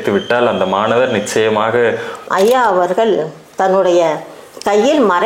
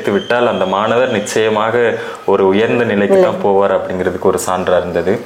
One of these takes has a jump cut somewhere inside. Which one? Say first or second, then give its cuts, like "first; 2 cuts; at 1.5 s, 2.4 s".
first; 1 cut; at 2.1 s